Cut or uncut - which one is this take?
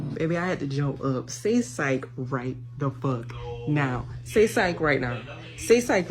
uncut